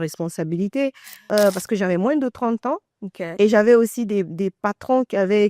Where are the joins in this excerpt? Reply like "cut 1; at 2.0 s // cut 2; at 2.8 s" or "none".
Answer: cut 1; at 1.1 s